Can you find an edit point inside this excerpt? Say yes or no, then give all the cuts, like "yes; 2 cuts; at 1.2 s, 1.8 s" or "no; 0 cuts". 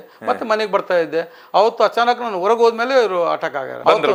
no; 0 cuts